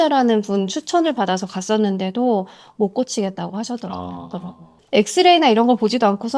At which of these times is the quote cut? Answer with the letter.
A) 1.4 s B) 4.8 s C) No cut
B